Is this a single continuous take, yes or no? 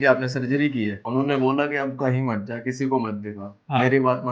no